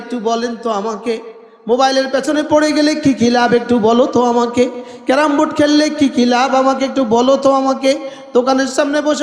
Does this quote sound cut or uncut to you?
uncut